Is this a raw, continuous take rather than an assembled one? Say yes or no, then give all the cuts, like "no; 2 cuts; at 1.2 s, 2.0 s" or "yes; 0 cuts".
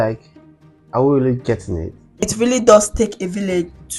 no; 1 cut; at 2.2 s